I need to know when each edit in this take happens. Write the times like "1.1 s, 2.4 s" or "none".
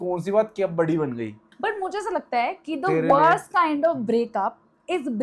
1.5 s